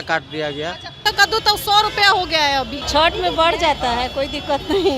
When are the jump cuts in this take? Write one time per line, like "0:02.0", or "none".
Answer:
0:01.0
0:02.8